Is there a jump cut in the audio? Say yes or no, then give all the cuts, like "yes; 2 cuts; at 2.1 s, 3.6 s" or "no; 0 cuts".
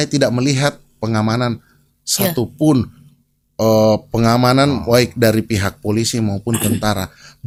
no; 0 cuts